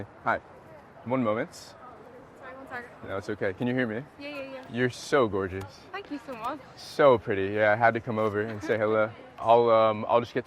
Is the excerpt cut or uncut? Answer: cut